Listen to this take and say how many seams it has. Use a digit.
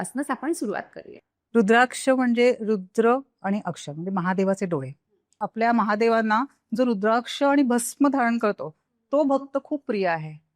1